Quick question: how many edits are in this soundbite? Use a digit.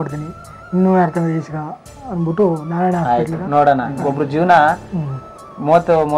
1